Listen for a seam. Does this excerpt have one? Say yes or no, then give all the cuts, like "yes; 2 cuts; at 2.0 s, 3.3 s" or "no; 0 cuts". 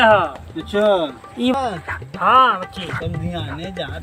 yes; 1 cut; at 1.5 s